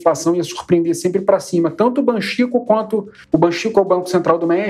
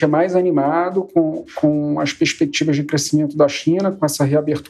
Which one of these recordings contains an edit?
first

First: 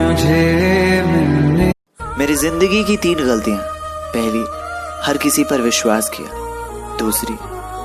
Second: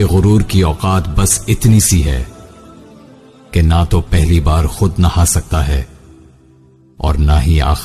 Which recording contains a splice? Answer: first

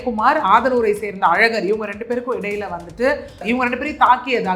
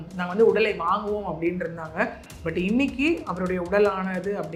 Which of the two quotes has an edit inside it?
first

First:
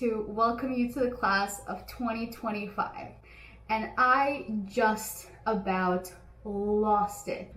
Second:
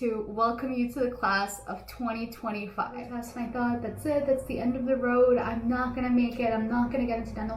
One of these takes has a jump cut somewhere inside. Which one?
second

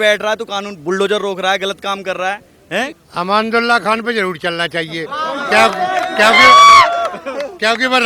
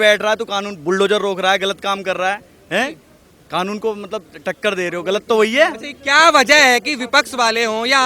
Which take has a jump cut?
first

